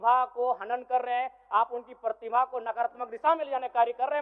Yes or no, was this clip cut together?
no